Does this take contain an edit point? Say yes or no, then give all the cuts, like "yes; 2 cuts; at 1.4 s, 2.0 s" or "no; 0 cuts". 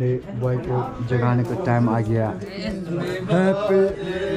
yes; 1 cut; at 2.9 s